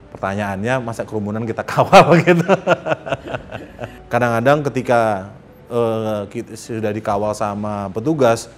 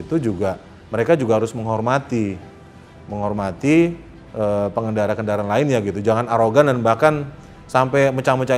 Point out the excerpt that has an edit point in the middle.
first; 1 cut; at 3.9 s

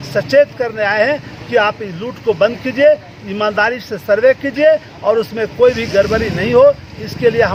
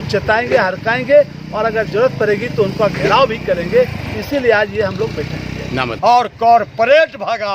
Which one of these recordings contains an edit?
second; 1 cut; at 5.9 s

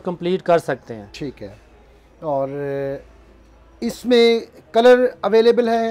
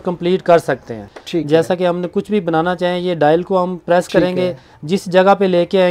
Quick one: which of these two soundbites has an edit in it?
second; 1 cut; at 1.1 s

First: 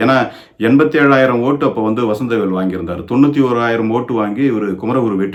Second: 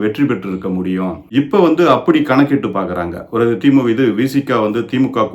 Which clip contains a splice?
second; 1 cut; at 1.2 s

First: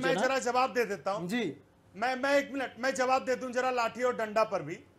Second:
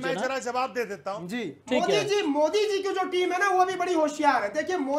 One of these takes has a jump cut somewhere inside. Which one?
second; 1 cut; at 1.5 s

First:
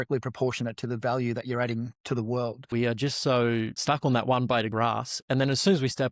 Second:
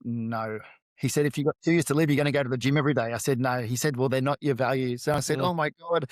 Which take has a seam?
first; 3 cuts; at 2.7 s, 3.8 s, 4.7 s

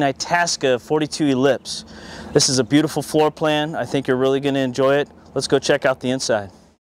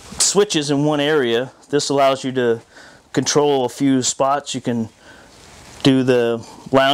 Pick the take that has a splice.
second; 1 cut; at 5.4 s

